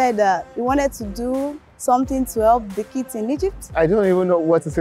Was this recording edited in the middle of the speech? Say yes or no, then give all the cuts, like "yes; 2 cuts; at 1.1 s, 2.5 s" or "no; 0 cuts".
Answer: yes; 2 cuts; at 1.6 s, 3.7 s